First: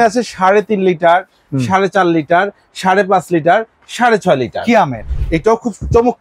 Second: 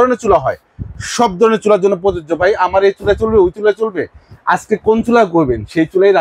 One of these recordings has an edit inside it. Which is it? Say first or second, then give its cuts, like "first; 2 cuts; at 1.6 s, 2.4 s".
first; 1 cut; at 5.0 s